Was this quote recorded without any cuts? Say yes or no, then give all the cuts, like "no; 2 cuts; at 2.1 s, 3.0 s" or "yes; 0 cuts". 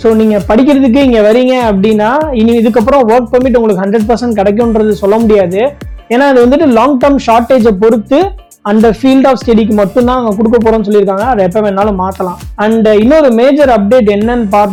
yes; 0 cuts